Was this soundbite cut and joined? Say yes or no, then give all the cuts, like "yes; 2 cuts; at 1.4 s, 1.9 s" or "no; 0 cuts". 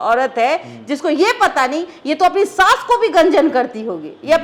no; 0 cuts